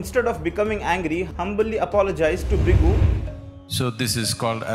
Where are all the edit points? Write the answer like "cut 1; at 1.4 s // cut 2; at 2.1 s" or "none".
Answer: cut 1; at 3.1 s